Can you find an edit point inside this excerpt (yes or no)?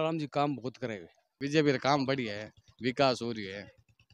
yes